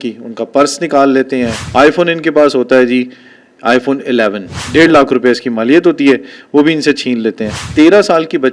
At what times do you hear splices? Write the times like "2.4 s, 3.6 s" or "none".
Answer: 1.6 s, 4.6 s, 7.5 s

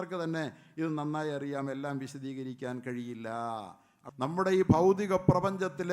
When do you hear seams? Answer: 3.9 s

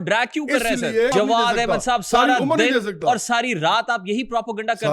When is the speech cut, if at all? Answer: 1.1 s

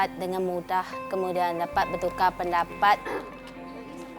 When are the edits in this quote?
none

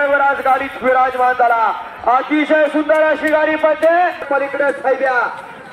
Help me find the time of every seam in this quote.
4.2 s

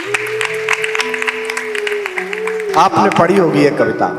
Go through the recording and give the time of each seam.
none

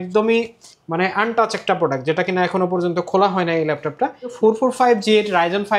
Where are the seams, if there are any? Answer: 4.3 s

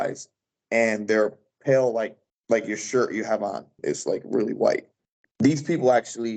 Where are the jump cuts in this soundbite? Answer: 3.8 s, 5.2 s

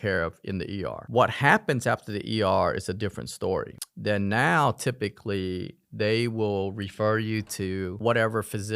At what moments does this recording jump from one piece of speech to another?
none

